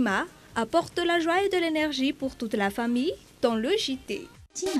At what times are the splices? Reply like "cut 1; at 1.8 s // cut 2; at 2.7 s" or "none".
none